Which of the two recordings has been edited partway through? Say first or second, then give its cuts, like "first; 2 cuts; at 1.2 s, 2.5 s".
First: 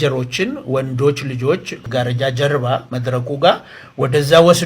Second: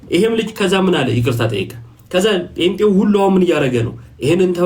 first; 1 cut; at 1.7 s